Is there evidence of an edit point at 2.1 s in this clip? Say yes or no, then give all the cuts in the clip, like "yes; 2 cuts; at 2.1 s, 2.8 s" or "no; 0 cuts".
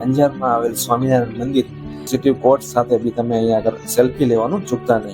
yes; 1 cut; at 2.1 s